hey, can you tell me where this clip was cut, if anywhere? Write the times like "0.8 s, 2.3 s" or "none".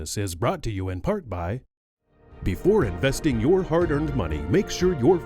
1.8 s